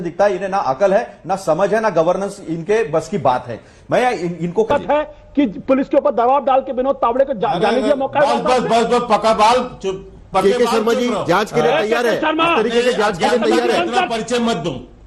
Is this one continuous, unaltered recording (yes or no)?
no